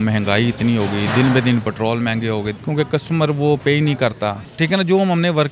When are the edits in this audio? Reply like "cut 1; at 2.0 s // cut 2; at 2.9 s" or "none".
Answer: cut 1; at 2.5 s // cut 2; at 4.4 s